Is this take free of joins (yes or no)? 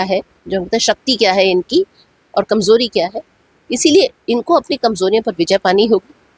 yes